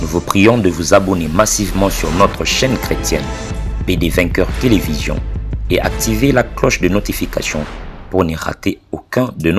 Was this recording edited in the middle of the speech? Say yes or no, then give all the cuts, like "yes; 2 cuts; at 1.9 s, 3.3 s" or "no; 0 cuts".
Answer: no; 0 cuts